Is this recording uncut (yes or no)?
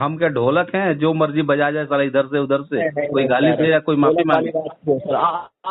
yes